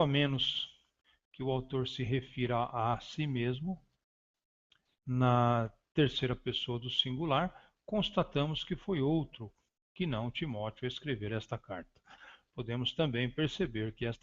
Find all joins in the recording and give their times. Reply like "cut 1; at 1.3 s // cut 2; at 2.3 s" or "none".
cut 1; at 6.2 s